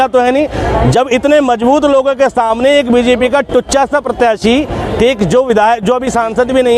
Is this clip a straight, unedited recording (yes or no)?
yes